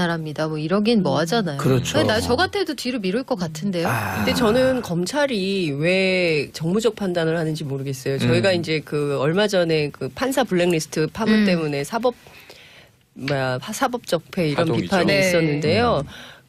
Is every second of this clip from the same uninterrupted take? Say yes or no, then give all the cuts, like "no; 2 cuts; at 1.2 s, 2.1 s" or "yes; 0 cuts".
yes; 0 cuts